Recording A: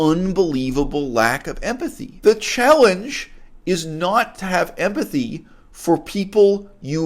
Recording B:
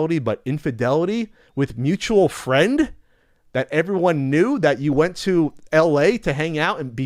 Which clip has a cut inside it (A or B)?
A